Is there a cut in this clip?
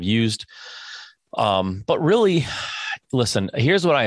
no; 0 cuts

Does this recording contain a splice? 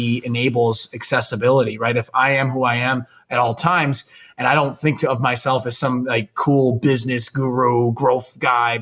no; 0 cuts

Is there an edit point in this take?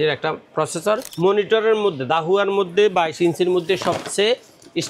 yes; 1 cut; at 1.1 s

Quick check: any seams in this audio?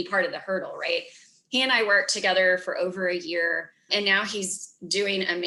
no; 0 cuts

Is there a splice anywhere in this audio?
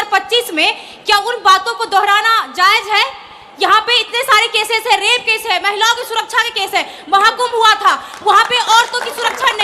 no; 0 cuts

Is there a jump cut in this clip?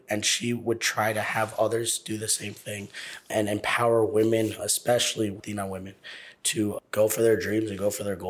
yes; 1 cut; at 5.4 s

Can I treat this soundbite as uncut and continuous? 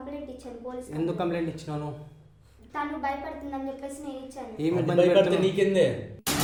yes; 0 cuts

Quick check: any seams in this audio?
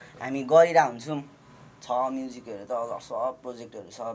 no; 0 cuts

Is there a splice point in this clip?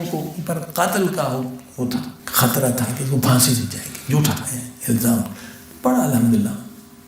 yes; 1 cut; at 2.2 s

